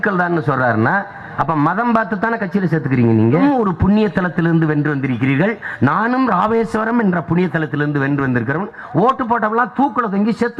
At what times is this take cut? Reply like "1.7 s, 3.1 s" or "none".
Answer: 3.4 s